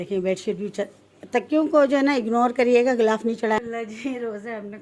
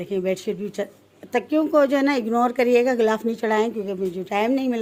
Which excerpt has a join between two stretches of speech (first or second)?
first